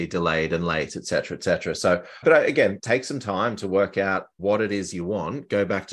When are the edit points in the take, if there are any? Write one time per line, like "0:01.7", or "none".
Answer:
0:02.8
0:04.3